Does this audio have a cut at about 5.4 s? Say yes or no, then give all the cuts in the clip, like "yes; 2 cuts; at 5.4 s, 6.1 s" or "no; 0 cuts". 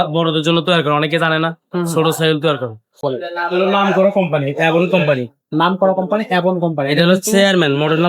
no; 1 cut; at 2.9 s